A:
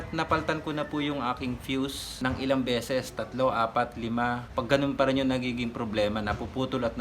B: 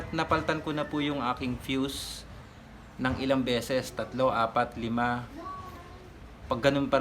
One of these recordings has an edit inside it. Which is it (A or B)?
A